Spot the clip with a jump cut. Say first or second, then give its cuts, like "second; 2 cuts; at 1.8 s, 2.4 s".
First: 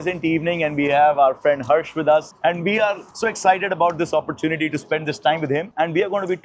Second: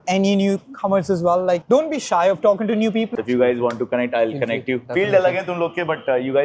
second; 2 cuts; at 3.1 s, 4.8 s